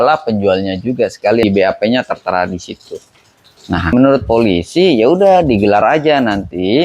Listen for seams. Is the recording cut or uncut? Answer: cut